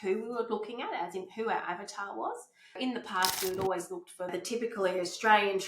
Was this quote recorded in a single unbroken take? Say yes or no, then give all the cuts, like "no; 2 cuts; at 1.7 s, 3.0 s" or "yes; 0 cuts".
no; 2 cuts; at 2.8 s, 4.3 s